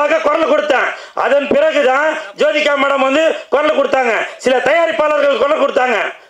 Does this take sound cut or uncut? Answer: uncut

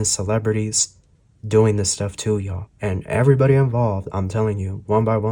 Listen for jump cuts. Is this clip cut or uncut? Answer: uncut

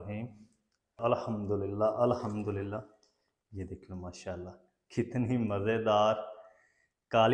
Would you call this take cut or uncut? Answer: cut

